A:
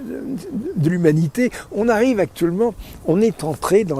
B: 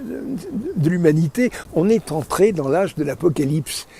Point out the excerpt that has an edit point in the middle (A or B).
B